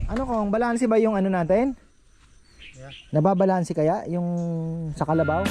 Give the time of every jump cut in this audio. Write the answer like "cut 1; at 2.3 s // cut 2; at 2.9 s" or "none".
none